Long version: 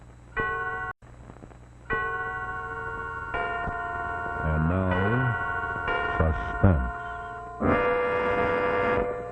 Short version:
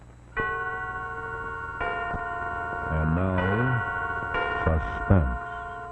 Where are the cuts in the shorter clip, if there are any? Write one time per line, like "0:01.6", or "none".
0:00.9